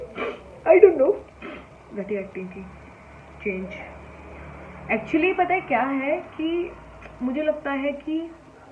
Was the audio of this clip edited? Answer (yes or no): no